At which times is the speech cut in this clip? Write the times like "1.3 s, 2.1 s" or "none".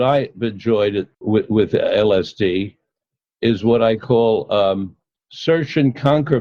1.1 s